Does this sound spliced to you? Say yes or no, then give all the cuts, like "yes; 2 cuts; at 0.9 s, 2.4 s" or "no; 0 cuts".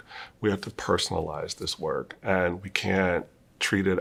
no; 0 cuts